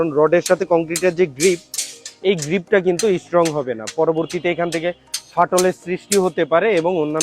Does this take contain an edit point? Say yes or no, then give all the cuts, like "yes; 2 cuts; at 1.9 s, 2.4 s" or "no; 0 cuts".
no; 0 cuts